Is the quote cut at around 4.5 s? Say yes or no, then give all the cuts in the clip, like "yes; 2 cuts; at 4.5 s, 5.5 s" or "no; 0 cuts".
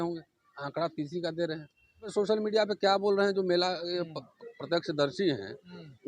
no; 1 cut; at 2.1 s